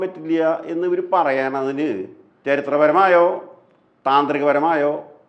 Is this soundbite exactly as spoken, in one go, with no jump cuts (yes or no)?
no